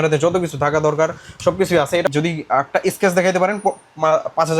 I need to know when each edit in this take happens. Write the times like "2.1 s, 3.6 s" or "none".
2.1 s